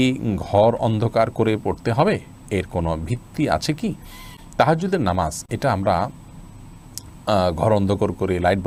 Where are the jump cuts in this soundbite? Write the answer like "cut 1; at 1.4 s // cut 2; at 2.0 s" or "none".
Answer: none